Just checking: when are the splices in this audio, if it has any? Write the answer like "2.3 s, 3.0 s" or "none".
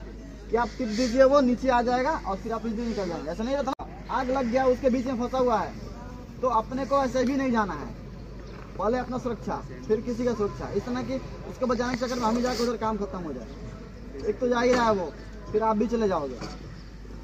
3.7 s